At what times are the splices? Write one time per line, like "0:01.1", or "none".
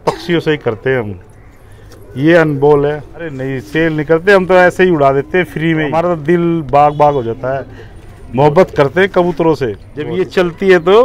0:03.5
0:06.0
0:10.2